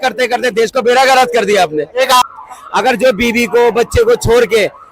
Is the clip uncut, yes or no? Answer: no